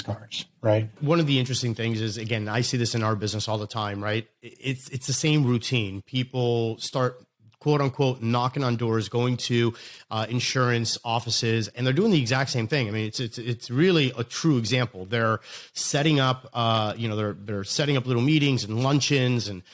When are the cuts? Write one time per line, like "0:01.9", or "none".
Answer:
0:01.0